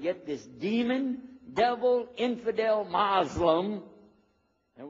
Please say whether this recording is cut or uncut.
uncut